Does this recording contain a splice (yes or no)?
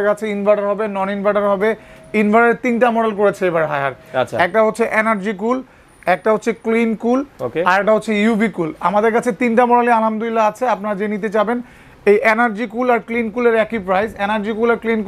no